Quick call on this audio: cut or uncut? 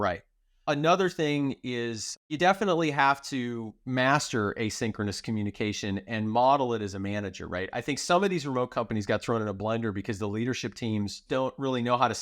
cut